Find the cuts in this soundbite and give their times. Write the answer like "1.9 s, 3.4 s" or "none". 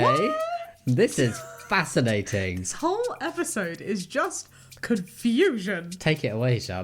none